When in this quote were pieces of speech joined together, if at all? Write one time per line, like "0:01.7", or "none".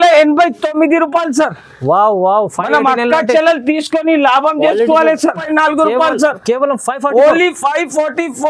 0:05.4